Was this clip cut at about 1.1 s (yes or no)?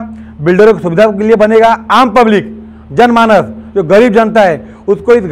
no